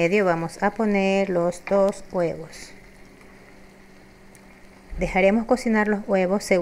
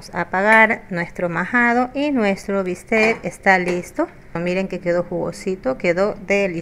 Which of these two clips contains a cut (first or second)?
second